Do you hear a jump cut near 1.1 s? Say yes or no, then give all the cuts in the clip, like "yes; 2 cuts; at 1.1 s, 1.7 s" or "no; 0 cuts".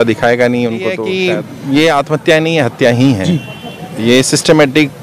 yes; 1 cut; at 1.1 s